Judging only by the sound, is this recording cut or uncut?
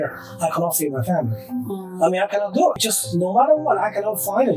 cut